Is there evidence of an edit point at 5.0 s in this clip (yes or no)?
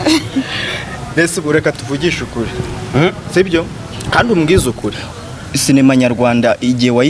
yes